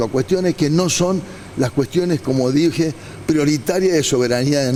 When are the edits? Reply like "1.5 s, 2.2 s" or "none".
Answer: none